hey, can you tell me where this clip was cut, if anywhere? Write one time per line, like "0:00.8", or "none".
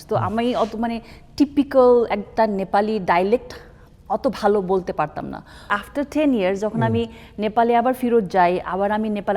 0:05.7